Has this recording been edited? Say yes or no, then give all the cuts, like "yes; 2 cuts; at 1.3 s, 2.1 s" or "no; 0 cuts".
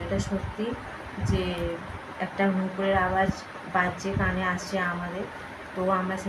no; 0 cuts